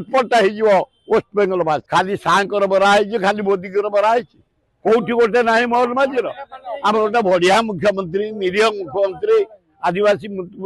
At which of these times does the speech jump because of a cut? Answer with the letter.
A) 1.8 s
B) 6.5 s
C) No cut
A